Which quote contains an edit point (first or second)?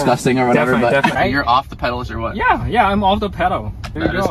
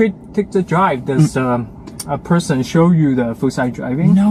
first